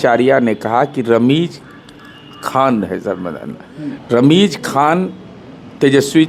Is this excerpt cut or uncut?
uncut